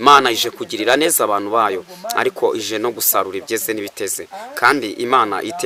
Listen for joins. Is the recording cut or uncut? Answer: uncut